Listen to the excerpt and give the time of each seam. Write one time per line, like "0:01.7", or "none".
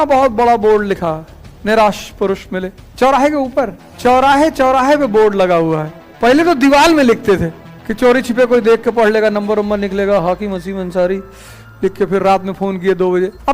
0:03.8
0:06.1